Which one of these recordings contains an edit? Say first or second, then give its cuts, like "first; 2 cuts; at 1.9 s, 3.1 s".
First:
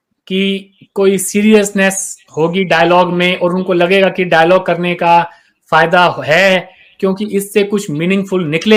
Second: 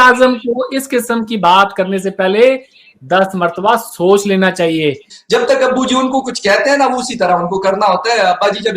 second; 1 cut; at 5.1 s